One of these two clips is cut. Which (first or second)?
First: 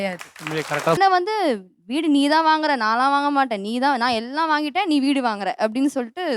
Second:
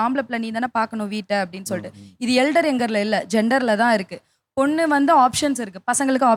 first